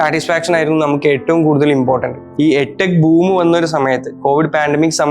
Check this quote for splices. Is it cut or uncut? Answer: cut